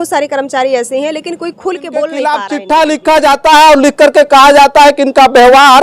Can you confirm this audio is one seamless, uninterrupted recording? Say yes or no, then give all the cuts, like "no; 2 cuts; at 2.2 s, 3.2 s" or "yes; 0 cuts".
no; 1 cut; at 2.2 s